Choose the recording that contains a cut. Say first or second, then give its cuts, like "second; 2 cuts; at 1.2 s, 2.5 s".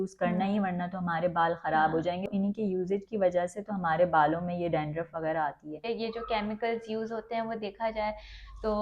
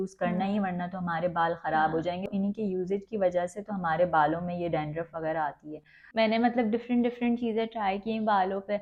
first; 1 cut; at 5.9 s